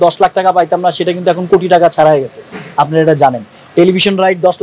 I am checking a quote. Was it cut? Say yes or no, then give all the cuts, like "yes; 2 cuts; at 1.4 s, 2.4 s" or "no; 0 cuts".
no; 0 cuts